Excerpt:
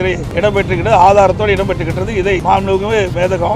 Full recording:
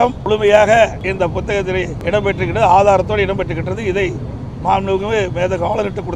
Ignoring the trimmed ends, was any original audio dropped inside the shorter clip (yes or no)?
yes